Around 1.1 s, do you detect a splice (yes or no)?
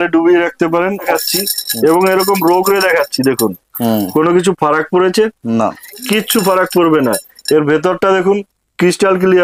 yes